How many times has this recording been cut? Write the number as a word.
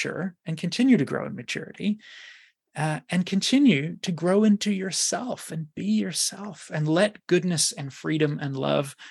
zero